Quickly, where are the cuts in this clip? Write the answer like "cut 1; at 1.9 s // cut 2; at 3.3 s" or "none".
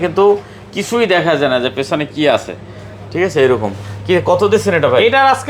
none